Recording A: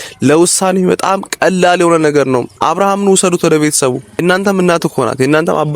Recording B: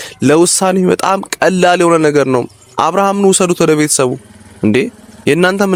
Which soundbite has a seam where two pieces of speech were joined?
A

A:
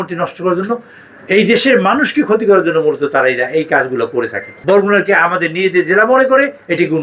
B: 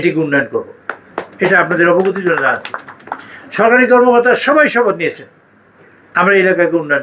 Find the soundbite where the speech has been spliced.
A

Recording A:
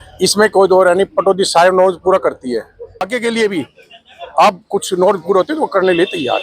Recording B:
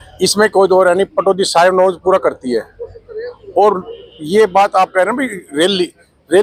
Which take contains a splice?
A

